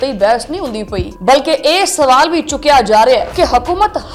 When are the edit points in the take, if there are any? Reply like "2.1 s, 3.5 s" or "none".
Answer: 1.1 s, 3.3 s